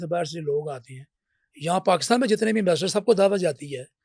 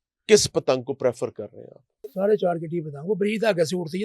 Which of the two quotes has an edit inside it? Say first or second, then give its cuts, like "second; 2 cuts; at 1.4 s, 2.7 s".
second; 1 cut; at 2.1 s